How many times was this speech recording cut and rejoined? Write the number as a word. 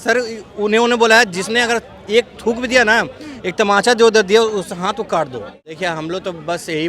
one